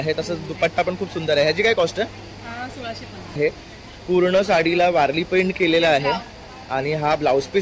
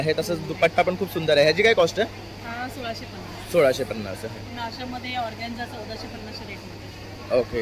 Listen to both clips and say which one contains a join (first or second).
first